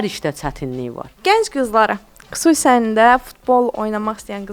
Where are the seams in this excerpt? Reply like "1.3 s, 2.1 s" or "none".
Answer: 1.1 s